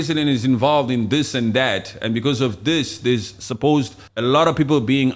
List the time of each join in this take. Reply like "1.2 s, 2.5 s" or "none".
4.0 s